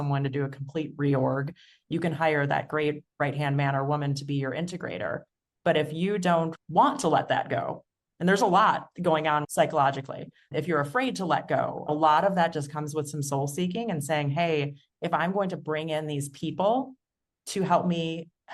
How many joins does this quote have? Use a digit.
3